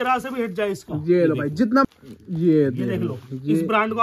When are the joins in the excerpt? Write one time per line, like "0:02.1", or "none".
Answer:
0:01.8